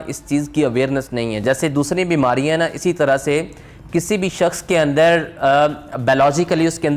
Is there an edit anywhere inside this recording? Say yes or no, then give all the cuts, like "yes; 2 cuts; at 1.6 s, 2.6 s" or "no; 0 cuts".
no; 0 cuts